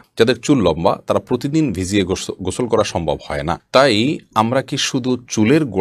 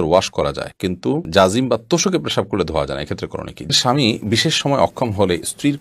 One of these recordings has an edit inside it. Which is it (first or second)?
second